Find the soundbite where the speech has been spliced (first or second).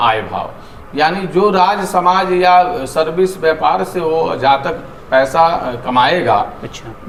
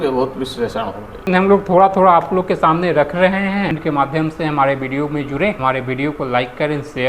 second